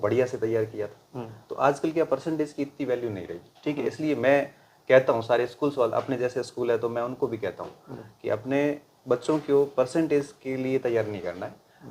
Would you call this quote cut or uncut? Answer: uncut